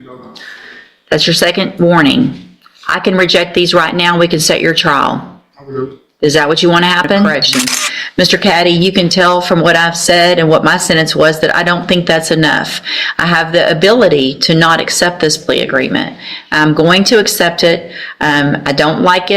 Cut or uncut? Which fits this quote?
cut